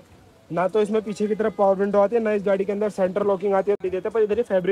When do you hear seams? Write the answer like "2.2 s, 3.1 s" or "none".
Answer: 3.8 s